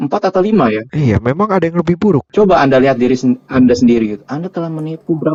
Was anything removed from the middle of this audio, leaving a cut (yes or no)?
no